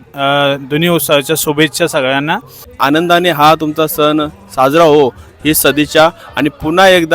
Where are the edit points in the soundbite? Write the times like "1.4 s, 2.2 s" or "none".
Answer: 2.7 s